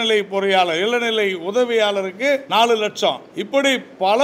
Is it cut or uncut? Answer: cut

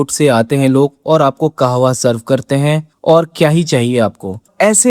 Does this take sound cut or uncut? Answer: uncut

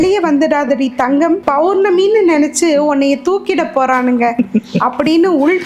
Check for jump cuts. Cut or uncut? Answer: cut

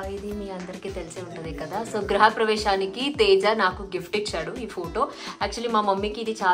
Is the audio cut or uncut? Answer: uncut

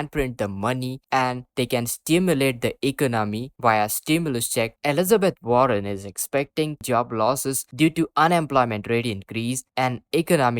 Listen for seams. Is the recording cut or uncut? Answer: cut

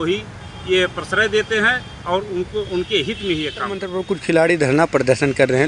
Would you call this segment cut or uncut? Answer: uncut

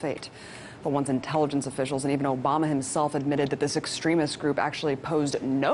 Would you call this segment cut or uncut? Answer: cut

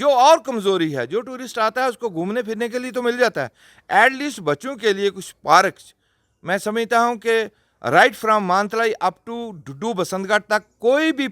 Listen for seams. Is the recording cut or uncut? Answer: uncut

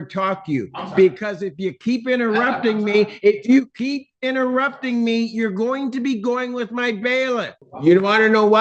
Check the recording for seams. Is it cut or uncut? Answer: cut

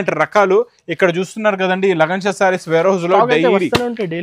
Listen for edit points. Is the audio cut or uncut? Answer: uncut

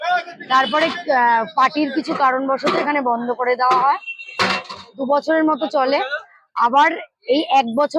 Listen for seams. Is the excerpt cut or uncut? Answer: uncut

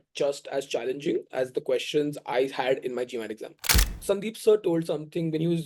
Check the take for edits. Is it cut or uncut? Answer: cut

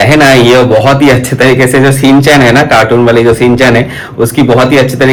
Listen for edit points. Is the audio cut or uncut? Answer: uncut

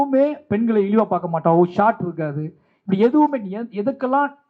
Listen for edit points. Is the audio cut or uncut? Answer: uncut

